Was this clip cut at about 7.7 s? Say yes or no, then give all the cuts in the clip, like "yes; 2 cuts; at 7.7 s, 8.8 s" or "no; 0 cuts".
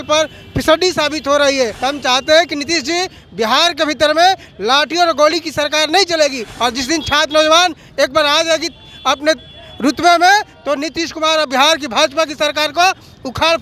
no; 2 cuts; at 1.8 s, 6.5 s